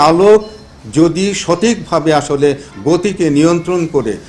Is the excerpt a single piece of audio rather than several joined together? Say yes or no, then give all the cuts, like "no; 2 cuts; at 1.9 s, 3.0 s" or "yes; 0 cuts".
yes; 0 cuts